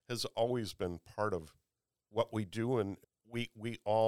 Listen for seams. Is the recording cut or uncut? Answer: cut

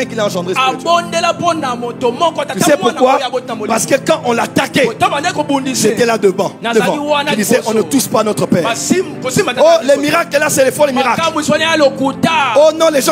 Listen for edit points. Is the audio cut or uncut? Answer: uncut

